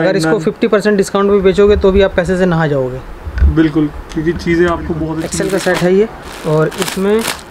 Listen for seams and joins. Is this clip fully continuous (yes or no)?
no